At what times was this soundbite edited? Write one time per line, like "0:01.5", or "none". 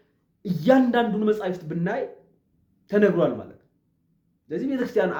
none